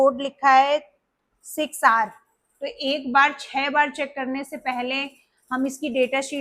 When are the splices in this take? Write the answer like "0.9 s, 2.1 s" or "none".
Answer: none